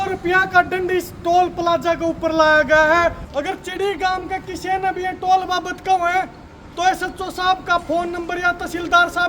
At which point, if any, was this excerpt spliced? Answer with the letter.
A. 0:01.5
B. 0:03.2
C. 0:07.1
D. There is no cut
B